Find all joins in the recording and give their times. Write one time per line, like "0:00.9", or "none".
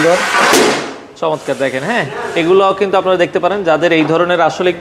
none